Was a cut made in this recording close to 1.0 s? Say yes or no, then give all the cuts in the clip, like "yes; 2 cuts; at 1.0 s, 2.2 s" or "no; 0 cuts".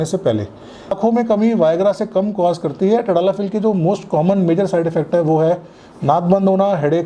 yes; 1 cut; at 1.0 s